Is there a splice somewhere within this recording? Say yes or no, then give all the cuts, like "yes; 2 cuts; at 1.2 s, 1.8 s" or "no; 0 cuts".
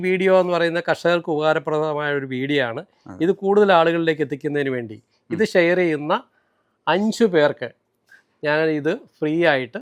no; 0 cuts